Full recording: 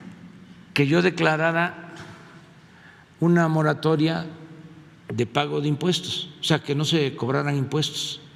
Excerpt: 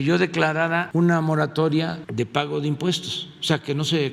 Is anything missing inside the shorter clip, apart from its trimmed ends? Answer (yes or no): yes